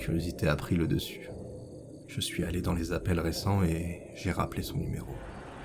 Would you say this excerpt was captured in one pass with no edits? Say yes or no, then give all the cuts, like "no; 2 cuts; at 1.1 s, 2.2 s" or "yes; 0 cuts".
no; 1 cut; at 1.0 s